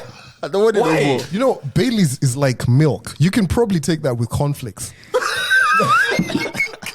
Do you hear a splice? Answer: yes; 1 cut; at 1.3 s

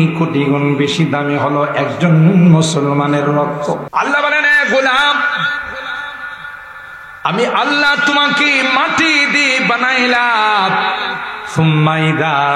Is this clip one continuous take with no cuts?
no; 1 cut; at 3.8 s

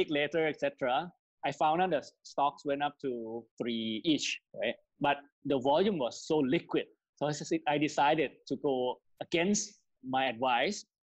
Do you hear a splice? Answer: yes; 2 cuts; at 4.0 s, 10.0 s

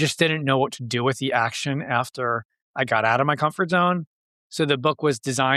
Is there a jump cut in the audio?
no; 0 cuts

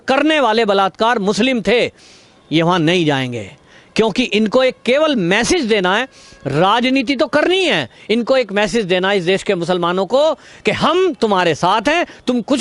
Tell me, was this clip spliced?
no; 0 cuts

